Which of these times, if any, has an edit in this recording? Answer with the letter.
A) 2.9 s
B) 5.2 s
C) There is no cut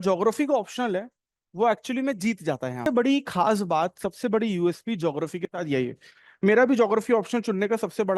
A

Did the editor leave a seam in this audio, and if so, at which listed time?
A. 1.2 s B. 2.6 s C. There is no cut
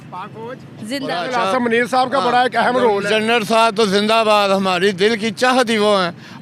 A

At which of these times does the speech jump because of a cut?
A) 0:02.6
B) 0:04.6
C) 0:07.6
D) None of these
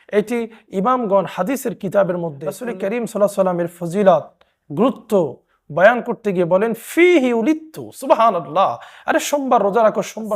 A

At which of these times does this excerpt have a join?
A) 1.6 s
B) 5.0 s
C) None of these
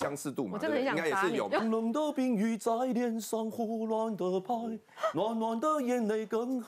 A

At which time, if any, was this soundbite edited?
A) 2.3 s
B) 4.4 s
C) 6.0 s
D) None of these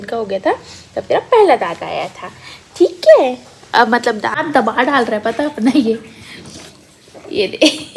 B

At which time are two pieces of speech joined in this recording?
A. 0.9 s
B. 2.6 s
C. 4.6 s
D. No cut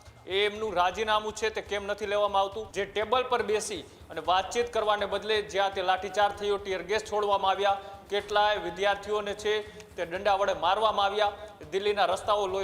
B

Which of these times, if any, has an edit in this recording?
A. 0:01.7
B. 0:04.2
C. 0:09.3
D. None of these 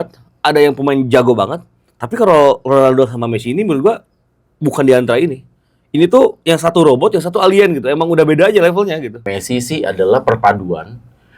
C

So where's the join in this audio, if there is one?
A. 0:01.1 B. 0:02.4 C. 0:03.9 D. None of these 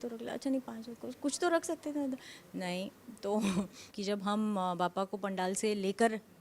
C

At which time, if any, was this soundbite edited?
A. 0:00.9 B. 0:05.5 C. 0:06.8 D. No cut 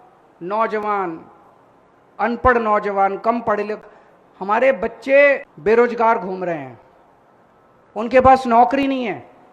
B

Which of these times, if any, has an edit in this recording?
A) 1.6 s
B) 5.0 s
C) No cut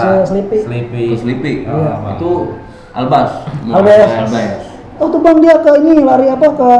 B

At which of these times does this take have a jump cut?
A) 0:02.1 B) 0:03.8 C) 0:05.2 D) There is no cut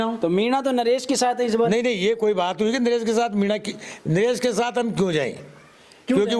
D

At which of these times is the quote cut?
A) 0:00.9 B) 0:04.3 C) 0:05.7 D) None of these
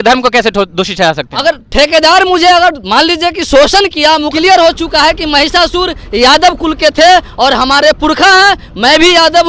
B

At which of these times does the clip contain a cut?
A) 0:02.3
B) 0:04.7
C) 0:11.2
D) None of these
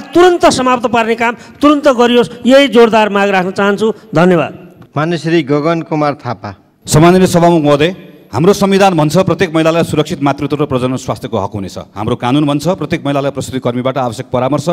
D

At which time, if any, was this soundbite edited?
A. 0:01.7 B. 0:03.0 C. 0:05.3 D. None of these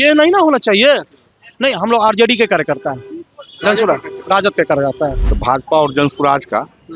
C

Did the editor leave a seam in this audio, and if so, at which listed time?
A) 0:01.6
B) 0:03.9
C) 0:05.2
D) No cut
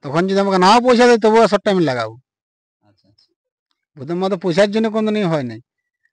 D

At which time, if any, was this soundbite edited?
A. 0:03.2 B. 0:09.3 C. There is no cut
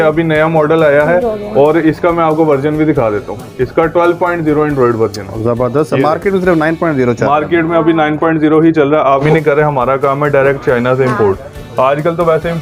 B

